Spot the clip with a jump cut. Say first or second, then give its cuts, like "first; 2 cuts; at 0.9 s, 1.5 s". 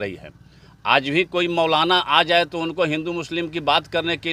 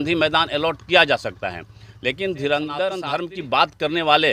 second; 1 cut; at 3.0 s